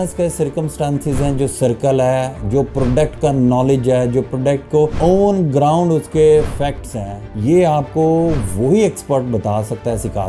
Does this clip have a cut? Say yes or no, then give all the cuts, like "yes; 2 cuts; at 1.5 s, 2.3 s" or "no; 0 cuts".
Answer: no; 0 cuts